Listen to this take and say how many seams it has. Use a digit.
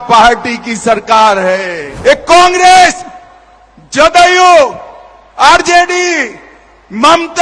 1